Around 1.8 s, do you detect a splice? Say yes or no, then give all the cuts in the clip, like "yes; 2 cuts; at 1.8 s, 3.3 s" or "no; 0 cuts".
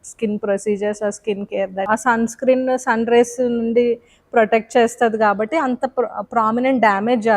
yes; 1 cut; at 1.8 s